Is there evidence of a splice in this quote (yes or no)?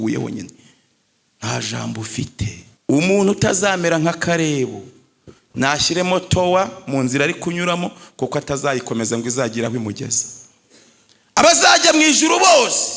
yes